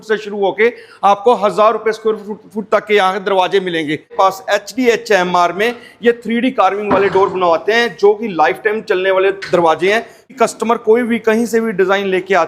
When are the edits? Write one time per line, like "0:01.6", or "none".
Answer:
0:04.1
0:10.3